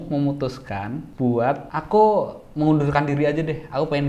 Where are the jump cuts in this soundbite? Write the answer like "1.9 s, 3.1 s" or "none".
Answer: 1.0 s, 1.7 s